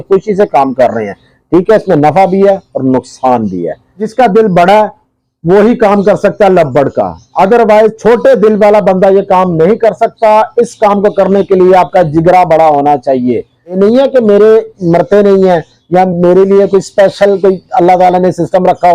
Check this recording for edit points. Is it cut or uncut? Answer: cut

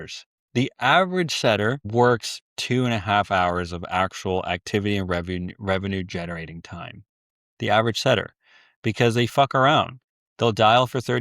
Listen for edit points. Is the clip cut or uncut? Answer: cut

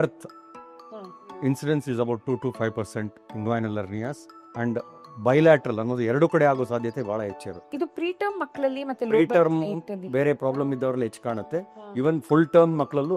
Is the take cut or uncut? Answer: uncut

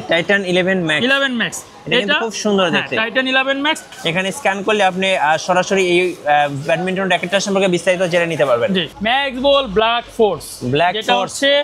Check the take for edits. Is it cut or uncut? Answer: cut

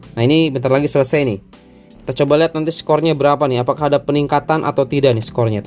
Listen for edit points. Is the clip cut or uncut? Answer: uncut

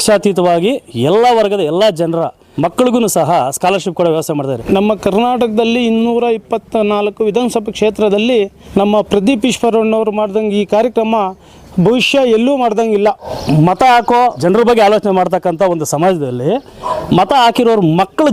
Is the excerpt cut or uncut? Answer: cut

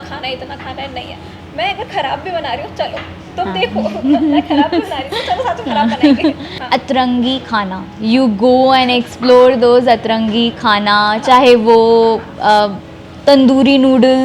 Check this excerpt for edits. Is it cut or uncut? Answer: cut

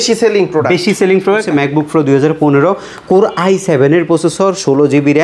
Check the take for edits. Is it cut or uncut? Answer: cut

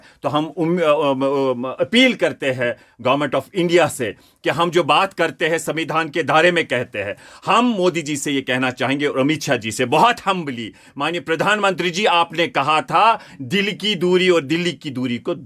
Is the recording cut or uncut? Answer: uncut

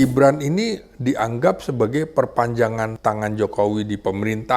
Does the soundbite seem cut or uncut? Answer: cut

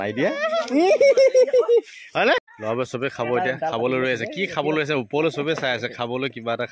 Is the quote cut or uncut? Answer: cut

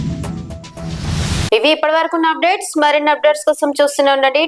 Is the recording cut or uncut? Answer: uncut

